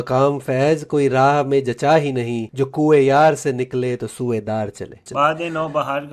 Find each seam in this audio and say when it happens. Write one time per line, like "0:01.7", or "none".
0:02.4
0:05.0